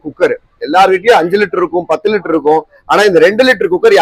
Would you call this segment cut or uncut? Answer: uncut